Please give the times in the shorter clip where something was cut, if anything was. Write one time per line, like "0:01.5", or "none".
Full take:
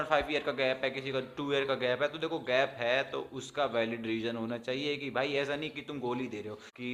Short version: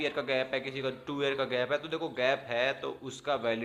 none